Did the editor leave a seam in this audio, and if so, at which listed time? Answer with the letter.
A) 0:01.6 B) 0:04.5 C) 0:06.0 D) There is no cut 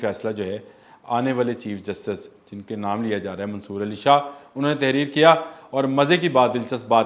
D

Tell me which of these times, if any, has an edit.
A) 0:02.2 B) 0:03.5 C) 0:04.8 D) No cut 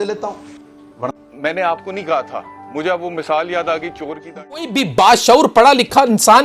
C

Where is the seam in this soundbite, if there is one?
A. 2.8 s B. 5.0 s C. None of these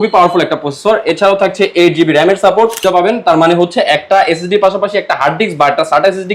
A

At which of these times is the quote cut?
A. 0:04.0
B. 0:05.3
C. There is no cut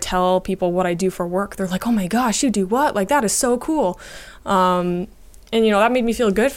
C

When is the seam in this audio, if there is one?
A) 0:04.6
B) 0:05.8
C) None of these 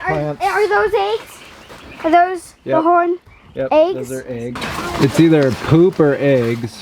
A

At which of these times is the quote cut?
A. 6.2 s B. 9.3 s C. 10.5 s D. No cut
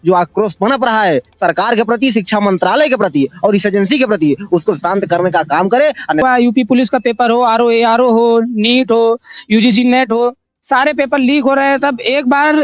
A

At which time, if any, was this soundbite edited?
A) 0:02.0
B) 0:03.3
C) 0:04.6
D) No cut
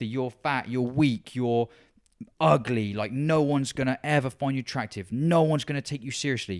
D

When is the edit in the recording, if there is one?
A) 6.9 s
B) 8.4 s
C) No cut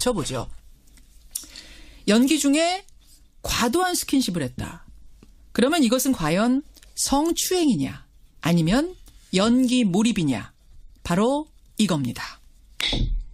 A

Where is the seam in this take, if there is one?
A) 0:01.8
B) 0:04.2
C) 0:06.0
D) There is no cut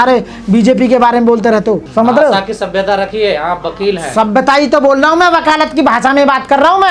A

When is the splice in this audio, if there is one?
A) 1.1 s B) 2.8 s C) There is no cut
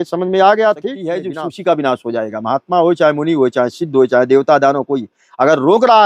A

